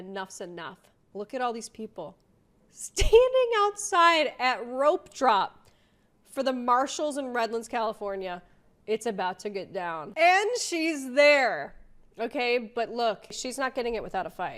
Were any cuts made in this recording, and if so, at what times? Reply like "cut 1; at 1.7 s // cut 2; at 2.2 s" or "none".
cut 1; at 10.0 s

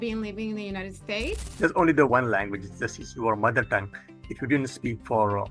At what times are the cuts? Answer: cut 1; at 1.4 s

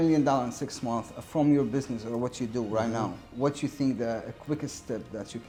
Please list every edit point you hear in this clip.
none

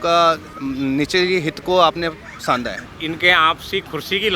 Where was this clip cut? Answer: cut 1; at 2.8 s

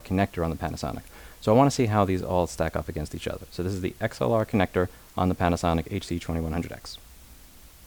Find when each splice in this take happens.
none

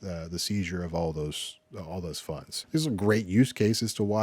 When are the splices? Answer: cut 1; at 2.5 s

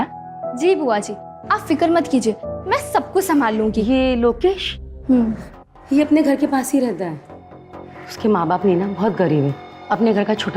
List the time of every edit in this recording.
cut 1; at 3.8 s

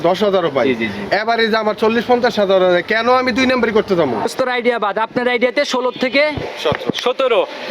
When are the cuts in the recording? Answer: cut 1; at 4.2 s

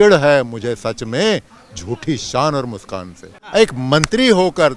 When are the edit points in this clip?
cut 1; at 3.3 s

